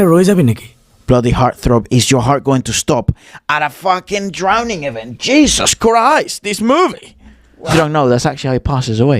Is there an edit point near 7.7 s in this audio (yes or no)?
yes